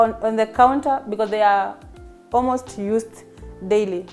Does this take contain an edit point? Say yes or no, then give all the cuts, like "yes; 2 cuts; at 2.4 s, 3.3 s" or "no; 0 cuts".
no; 0 cuts